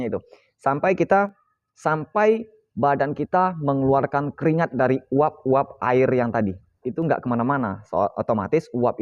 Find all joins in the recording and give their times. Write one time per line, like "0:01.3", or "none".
0:01.4
0:06.9